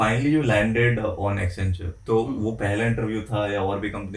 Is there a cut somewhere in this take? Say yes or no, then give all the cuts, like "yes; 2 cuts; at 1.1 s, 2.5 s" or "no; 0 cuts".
no; 0 cuts